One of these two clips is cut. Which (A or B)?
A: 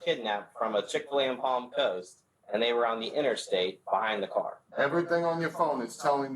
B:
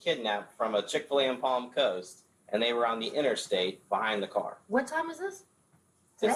A